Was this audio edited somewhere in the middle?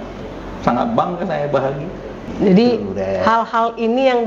yes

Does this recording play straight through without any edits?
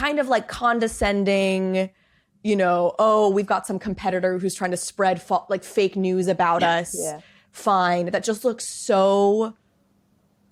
yes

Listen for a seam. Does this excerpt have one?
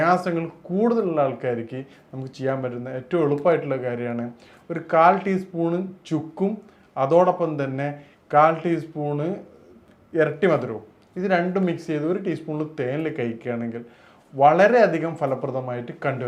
no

